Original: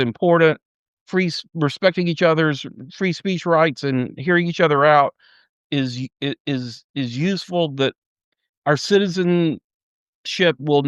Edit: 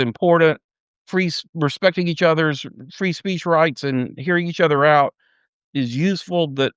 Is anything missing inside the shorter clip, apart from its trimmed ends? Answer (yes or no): yes